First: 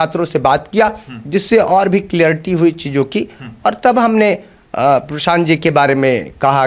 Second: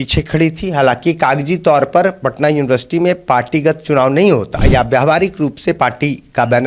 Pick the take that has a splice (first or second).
second